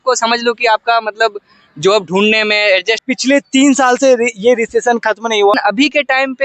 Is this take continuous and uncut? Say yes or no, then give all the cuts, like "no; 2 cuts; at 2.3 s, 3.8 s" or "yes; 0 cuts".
no; 2 cuts; at 3.0 s, 5.5 s